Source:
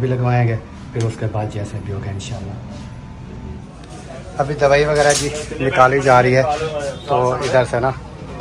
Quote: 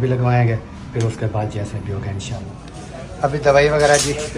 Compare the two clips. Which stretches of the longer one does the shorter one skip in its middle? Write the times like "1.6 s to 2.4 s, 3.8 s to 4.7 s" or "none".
2.6 s to 3.7 s